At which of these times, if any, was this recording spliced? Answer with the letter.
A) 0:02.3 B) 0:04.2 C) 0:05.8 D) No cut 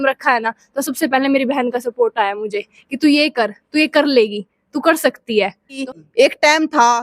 C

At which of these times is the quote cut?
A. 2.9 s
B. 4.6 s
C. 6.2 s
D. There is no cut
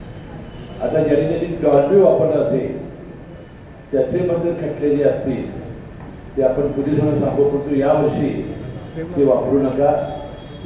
D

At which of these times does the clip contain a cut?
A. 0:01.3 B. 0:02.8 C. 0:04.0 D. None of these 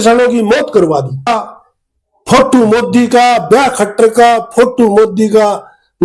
A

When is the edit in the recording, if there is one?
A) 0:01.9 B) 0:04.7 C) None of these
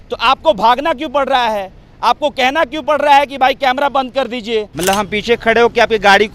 B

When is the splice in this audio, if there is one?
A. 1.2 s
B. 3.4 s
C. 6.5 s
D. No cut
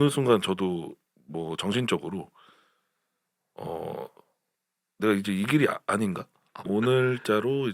C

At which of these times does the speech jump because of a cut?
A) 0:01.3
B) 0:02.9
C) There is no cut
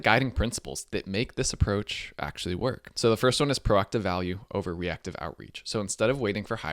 B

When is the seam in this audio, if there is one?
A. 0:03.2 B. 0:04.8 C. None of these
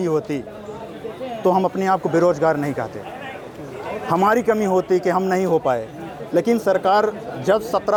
C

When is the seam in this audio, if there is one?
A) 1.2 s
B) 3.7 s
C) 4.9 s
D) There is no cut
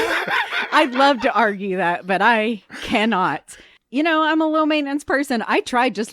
B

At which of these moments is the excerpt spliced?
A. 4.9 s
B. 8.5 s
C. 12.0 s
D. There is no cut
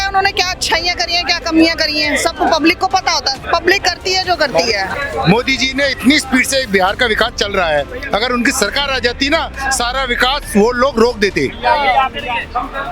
A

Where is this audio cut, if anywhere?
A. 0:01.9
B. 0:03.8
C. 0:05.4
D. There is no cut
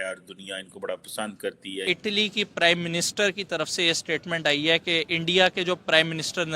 A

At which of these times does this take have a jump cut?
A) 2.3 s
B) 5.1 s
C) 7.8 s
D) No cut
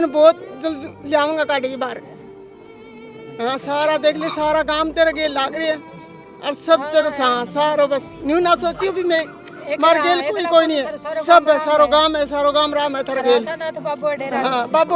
D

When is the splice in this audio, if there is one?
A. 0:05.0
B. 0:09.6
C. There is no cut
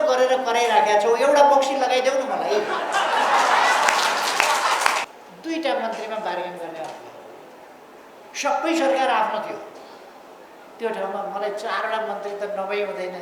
A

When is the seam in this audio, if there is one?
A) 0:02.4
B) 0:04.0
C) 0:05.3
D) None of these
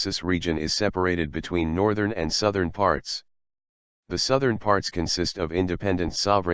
B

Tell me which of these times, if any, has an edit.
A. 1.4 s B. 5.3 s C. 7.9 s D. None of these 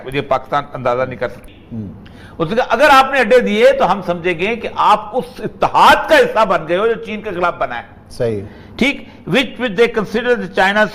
A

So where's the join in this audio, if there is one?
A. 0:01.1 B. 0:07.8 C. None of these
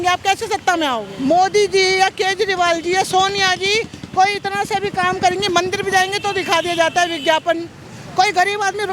A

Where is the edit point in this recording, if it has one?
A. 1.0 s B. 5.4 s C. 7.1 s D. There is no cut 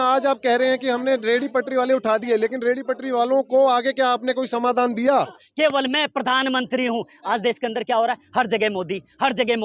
B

